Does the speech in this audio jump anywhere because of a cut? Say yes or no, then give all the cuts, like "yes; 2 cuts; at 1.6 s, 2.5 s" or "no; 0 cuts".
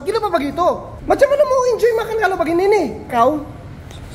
yes; 2 cuts; at 0.9 s, 3.1 s